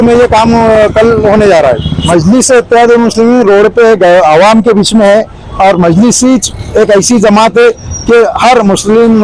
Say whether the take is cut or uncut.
cut